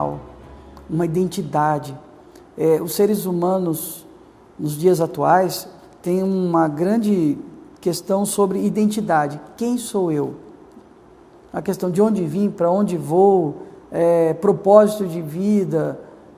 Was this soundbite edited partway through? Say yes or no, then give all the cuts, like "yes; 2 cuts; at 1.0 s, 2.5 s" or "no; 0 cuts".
no; 0 cuts